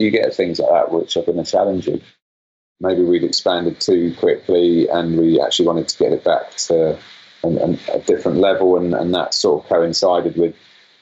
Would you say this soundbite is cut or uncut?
cut